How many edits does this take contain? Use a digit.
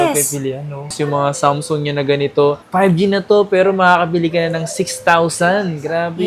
1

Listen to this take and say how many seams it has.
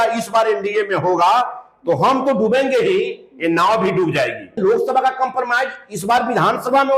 1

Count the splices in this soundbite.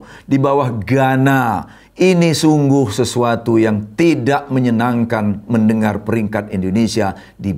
0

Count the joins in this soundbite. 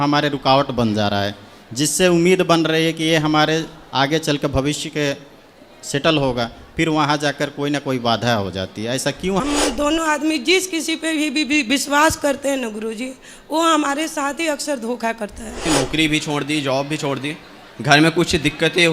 2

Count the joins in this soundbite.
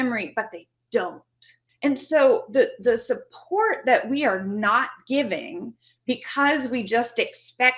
1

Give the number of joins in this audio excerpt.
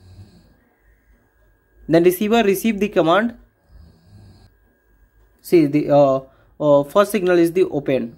1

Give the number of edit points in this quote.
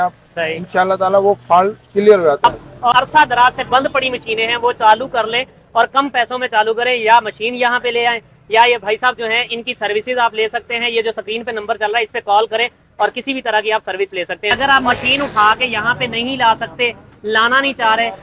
2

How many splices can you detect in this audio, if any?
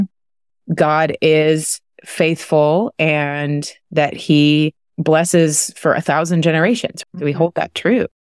1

